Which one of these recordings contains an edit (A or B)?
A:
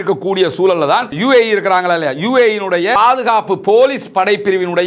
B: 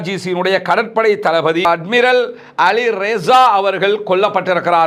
A